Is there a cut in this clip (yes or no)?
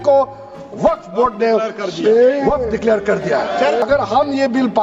yes